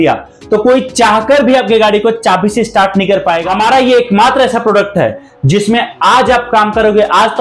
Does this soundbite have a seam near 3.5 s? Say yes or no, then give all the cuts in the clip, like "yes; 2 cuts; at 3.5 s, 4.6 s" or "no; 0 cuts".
yes; 1 cut; at 3.5 s